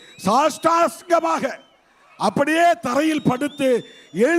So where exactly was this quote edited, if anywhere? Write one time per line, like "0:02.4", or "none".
none